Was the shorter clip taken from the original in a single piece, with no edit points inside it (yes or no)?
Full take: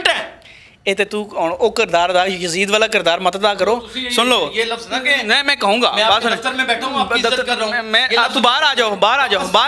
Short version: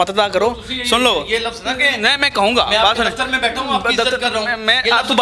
yes